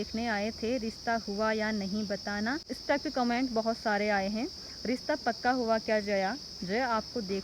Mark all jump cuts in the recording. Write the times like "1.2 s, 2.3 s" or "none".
none